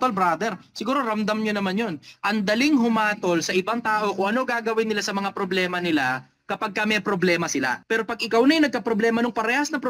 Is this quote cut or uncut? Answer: cut